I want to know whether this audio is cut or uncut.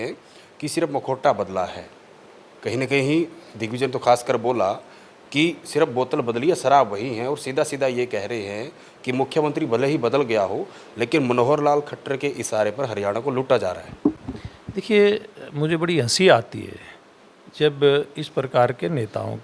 uncut